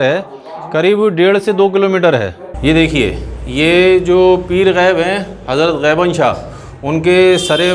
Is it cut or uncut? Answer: cut